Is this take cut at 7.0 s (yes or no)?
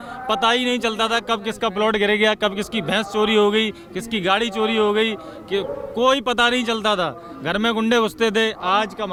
no